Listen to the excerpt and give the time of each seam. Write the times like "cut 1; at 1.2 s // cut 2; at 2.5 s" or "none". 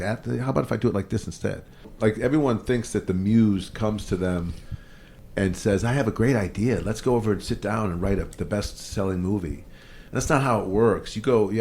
cut 1; at 1.9 s